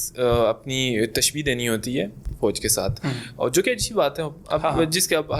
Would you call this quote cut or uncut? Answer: uncut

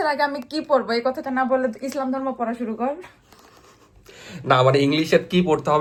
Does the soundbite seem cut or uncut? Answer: uncut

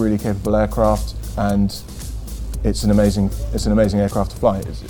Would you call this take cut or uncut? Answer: uncut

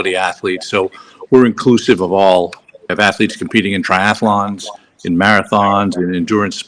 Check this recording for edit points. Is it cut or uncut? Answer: cut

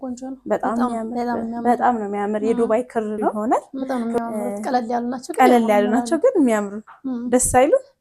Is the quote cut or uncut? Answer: cut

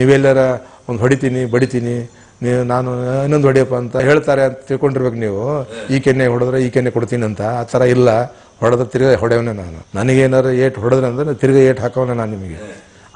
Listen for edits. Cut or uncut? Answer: uncut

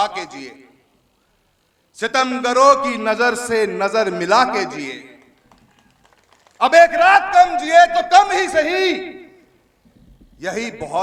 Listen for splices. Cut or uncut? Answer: uncut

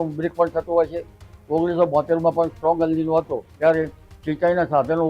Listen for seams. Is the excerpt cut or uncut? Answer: cut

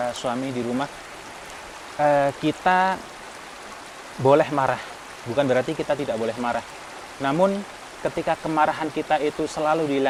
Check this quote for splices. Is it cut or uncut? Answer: uncut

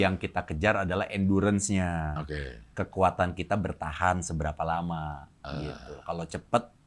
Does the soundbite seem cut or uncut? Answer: uncut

